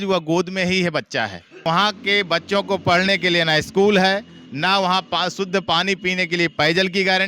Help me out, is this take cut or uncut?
cut